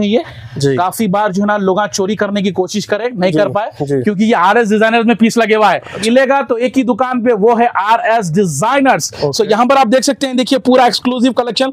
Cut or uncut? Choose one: cut